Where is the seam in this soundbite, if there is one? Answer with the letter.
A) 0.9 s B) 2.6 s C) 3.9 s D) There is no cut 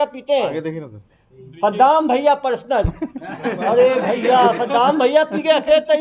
D